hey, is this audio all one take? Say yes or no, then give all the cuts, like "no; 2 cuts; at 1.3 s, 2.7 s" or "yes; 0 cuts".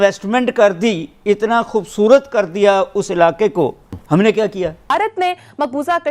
no; 2 cuts; at 4.0 s, 4.9 s